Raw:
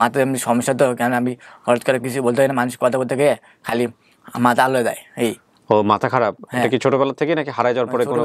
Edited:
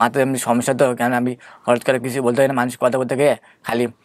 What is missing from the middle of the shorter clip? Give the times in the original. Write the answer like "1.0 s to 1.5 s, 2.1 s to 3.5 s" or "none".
none